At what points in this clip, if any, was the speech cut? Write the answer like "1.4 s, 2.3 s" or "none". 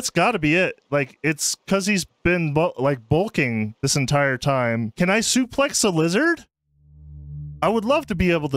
4.9 s